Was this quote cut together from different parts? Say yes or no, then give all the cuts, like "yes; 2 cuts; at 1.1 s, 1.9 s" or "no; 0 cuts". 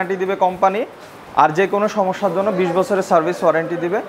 no; 0 cuts